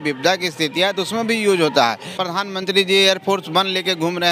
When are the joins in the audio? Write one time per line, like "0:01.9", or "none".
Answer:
0:02.1